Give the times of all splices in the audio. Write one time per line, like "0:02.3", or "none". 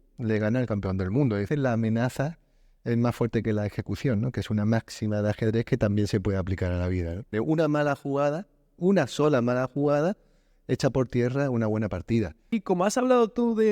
0:01.5
0:07.3
0:12.5